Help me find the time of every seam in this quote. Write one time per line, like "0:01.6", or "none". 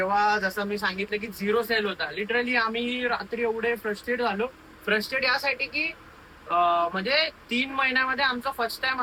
none